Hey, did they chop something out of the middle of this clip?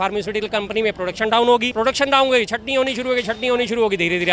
yes; 1 cut; at 1.7 s

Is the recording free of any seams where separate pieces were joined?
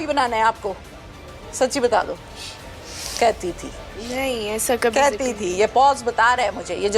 yes; 0 cuts

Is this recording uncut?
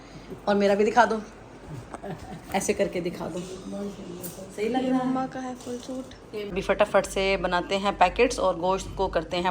no; 1 cut; at 6.5 s

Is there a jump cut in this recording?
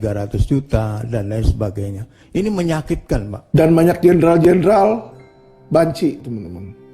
yes; 1 cut; at 3.6 s

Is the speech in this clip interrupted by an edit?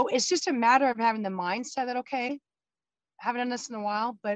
no; 0 cuts

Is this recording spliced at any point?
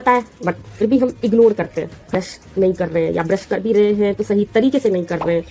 yes; 1 cut; at 2.1 s

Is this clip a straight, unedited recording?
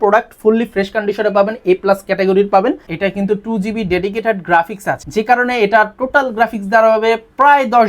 no; 2 cuts; at 2.9 s, 5.0 s

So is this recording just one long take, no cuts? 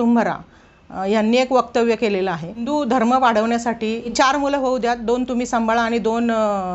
no; 2 cuts; at 2.7 s, 4.1 s

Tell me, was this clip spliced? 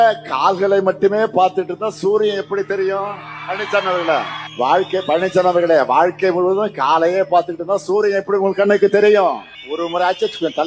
yes; 2 cuts; at 4.4 s, 9.6 s

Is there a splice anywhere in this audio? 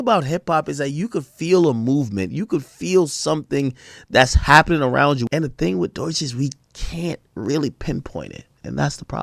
yes; 1 cut; at 5.2 s

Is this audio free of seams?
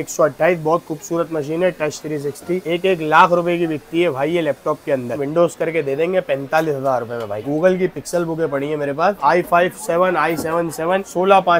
no; 2 cuts; at 5.2 s, 7.4 s

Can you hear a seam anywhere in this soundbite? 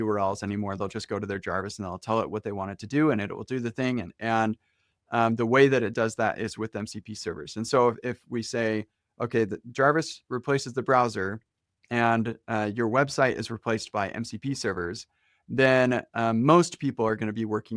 no; 0 cuts

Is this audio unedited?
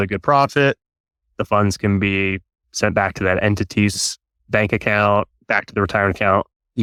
yes; 0 cuts

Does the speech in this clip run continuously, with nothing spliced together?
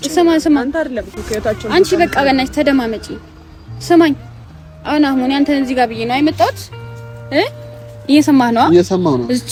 yes; 0 cuts

